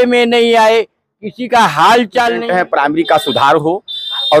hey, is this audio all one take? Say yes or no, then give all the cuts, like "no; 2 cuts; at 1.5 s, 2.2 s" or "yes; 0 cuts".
no; 1 cut; at 2.4 s